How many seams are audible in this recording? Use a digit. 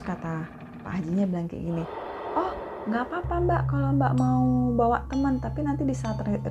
0